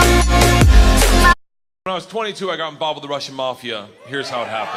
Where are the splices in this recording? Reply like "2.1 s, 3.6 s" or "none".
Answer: none